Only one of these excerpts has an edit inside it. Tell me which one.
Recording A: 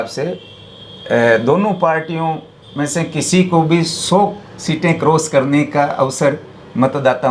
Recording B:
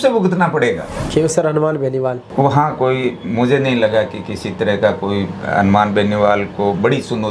B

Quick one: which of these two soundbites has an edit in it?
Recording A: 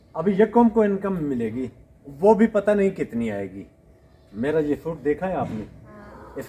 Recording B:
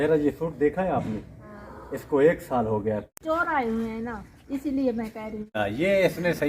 B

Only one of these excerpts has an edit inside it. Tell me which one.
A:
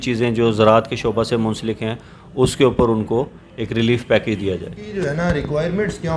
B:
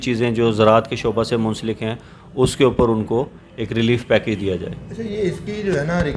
A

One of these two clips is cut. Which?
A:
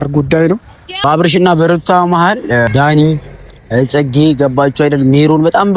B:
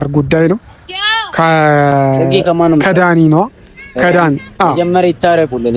A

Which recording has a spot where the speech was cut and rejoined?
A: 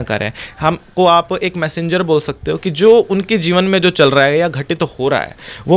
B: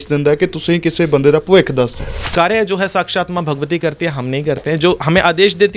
B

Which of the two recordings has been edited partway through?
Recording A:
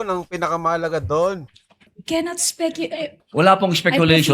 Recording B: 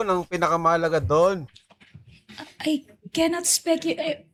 A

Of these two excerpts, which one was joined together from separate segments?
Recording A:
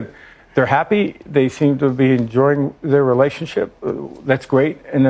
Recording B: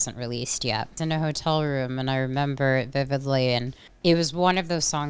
B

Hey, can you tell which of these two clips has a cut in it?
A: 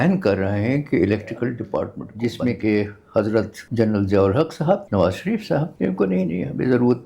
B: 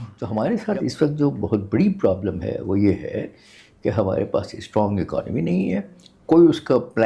A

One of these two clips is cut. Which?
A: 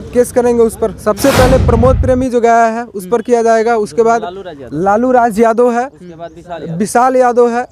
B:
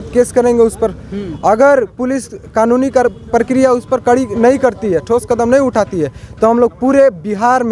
A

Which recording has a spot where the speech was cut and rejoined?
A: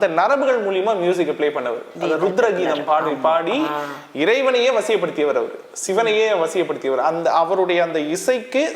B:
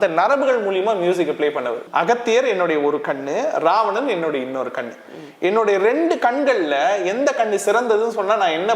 B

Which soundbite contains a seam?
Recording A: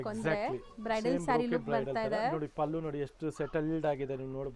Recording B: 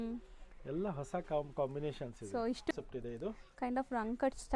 B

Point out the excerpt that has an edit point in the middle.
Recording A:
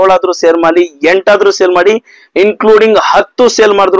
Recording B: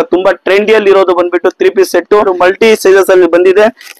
B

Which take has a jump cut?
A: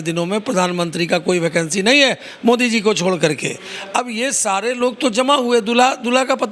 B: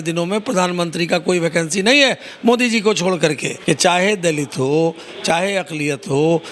B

